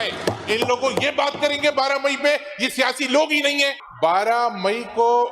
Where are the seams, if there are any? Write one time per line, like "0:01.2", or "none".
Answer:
0:03.9

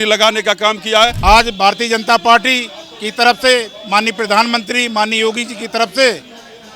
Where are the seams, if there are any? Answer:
0:01.2

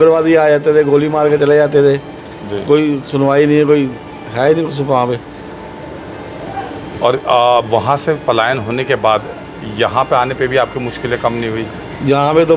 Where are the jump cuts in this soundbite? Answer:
none

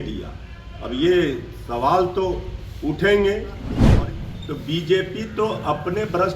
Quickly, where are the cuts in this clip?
0:03.8

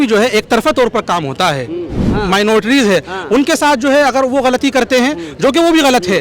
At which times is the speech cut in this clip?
0:02.0

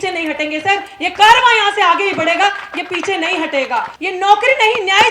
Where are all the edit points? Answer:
0:03.9

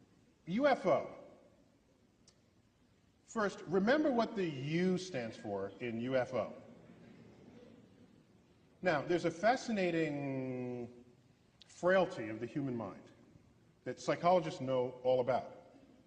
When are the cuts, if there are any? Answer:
none

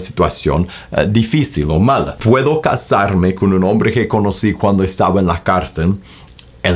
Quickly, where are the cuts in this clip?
0:02.1

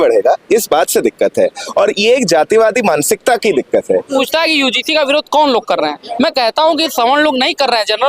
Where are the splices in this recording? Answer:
0:04.1

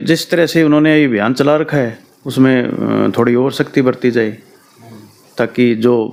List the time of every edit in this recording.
none

